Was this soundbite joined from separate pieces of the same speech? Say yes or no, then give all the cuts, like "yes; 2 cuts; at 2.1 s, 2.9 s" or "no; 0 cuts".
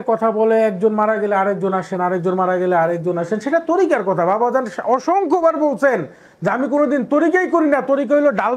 no; 0 cuts